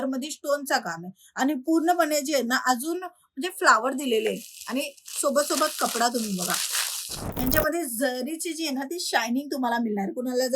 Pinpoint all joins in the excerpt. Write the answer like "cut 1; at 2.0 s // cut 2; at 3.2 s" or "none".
cut 1; at 7.2 s

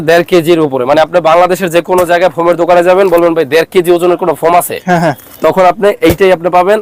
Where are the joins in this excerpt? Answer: none

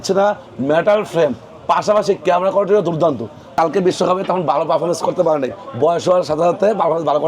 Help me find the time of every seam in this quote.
cut 1; at 3.4 s

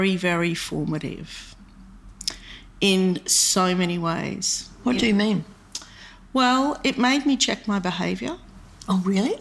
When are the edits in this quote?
none

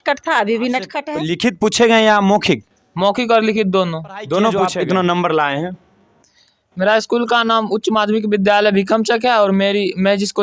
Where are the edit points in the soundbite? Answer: cut 1; at 1.1 s // cut 2; at 4.6 s

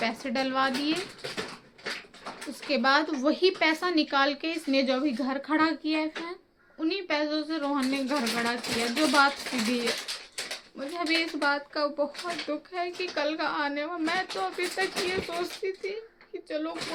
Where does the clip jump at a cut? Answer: none

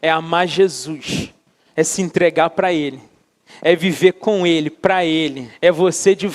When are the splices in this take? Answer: cut 1; at 5.4 s

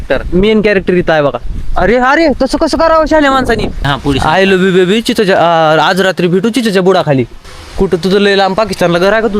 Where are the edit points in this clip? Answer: cut 1; at 3.8 s // cut 2; at 7.4 s

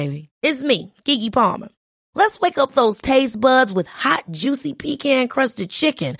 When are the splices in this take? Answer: none

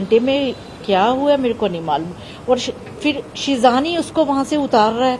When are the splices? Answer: none

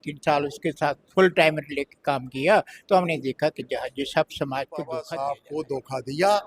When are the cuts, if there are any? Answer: cut 1; at 5.1 s

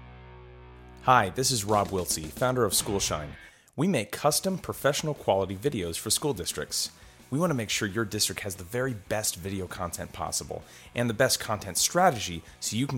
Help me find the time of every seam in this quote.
cut 1; at 0.9 s

